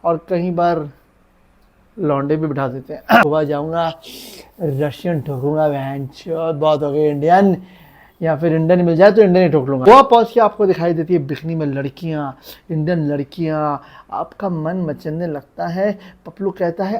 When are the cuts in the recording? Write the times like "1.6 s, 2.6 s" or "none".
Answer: 3.2 s, 9.9 s